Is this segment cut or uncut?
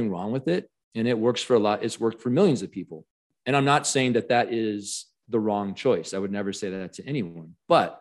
cut